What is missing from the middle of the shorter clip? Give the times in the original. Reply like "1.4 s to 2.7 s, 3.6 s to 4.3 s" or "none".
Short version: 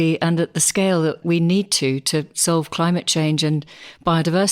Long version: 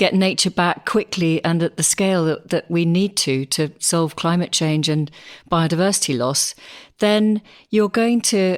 2.4 s to 2.7 s

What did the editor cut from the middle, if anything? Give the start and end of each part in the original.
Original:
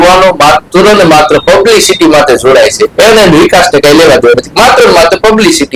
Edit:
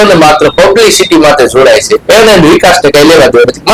none

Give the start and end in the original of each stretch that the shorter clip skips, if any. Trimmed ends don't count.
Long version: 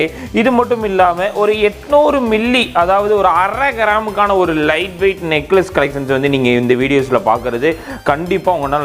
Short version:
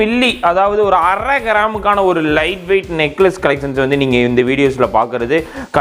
none

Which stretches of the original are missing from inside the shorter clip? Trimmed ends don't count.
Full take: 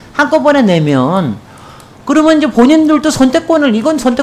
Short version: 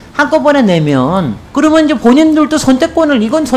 1.4 s to 1.9 s

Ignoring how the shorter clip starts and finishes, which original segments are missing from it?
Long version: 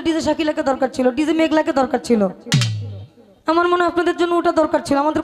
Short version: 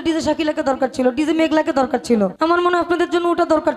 2.3 s to 3.4 s

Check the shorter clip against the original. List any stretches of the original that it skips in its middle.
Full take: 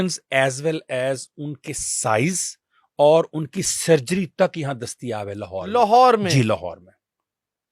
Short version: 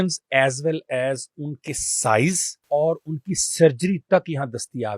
2.5 s to 2.8 s

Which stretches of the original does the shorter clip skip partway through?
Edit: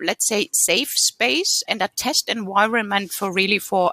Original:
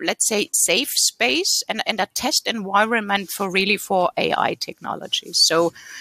1.6 s to 1.8 s

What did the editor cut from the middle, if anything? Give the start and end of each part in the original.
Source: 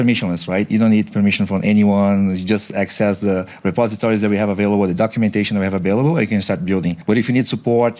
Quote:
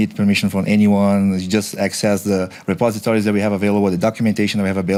none

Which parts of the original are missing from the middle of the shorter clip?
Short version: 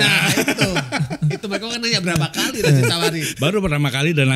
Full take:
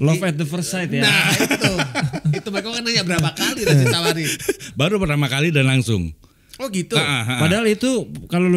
4.3 s to 4.7 s

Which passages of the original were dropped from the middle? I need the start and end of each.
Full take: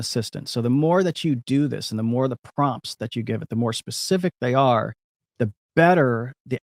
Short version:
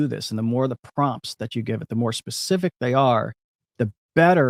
none

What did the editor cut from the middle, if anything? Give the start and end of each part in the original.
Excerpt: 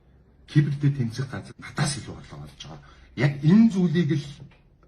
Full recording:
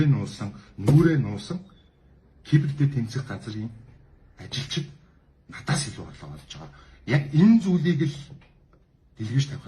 3.4 s to 5.4 s

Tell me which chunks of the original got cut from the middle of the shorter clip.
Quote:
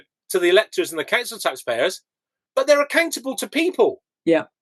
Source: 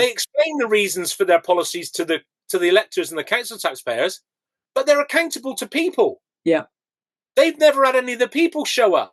none

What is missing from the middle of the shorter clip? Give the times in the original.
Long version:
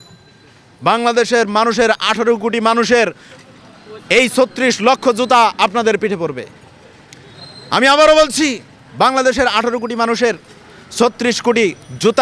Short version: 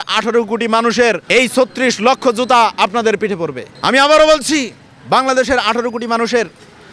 3.2 s to 4.0 s, 6.5 s to 7.5 s

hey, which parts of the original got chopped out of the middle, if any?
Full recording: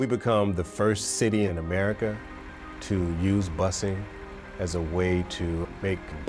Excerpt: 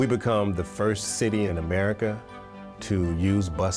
none

